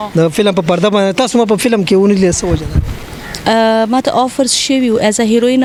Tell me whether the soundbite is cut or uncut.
uncut